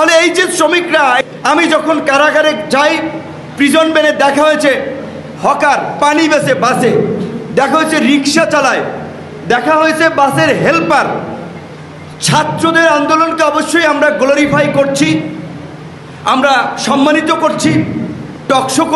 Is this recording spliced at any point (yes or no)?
yes